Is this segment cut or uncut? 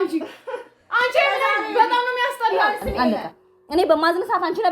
cut